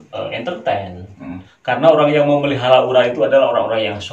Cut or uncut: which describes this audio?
cut